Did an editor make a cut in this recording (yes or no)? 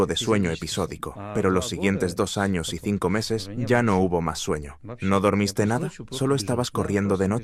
no